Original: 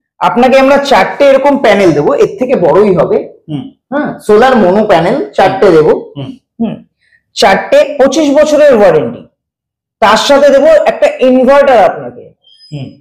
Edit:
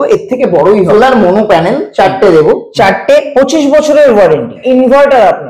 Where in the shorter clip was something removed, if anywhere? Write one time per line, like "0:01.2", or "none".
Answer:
0:00.9
0:02.7
0:04.6